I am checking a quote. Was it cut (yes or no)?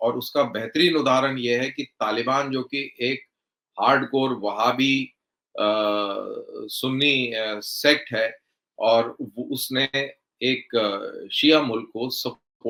no